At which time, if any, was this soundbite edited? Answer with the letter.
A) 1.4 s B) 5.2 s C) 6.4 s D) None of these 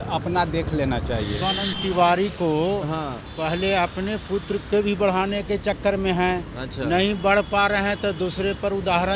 A